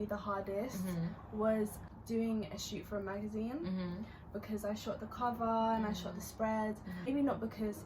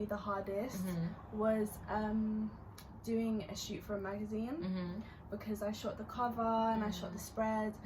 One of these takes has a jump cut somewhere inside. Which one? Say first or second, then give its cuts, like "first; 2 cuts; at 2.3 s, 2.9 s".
first; 2 cuts; at 1.8 s, 7.1 s